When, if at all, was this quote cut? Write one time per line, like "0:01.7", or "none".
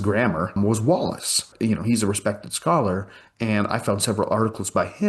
0:01.4